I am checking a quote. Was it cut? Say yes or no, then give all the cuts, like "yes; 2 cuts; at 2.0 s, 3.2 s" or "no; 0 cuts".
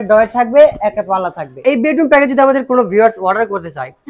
yes; 1 cut; at 1.5 s